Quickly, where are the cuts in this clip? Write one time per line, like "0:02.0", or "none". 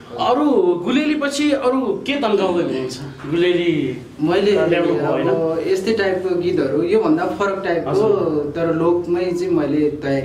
none